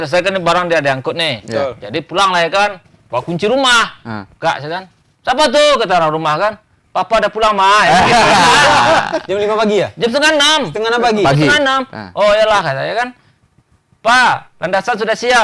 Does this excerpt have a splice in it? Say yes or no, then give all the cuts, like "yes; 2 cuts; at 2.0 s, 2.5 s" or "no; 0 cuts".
no; 0 cuts